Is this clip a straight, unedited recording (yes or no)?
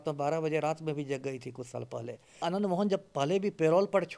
no